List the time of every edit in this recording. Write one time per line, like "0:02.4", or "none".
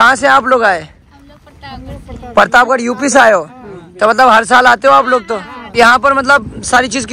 0:05.8